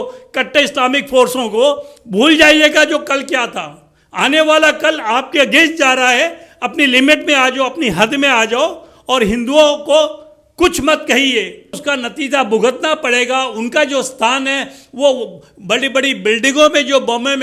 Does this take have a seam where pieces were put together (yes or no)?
yes